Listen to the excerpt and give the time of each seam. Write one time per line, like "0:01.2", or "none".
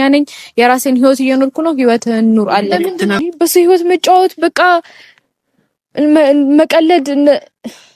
0:03.2